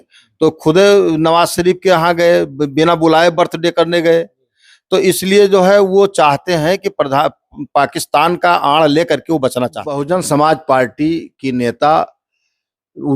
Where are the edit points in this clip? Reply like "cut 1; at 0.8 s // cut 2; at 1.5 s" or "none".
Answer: cut 1; at 10.0 s